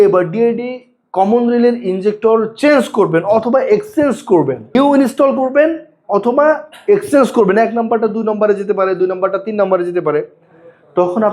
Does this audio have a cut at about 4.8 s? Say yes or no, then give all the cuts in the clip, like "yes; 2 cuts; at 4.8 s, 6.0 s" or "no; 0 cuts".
yes; 1 cut; at 4.8 s